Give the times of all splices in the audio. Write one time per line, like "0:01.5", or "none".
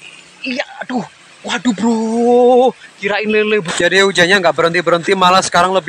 0:03.6